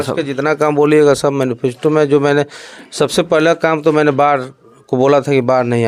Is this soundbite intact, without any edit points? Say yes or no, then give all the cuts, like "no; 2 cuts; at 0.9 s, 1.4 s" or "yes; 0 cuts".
yes; 0 cuts